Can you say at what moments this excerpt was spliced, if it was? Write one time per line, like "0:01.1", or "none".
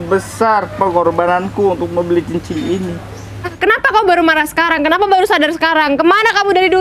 0:03.5